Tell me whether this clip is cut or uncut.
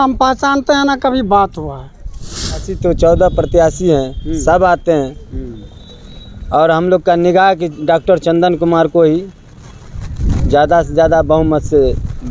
cut